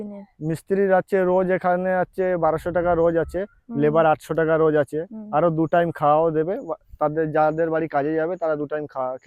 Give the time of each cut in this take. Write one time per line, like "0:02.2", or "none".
none